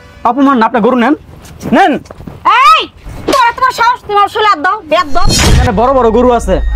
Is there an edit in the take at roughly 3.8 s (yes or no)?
no